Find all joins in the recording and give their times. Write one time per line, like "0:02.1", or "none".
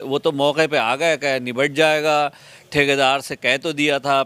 none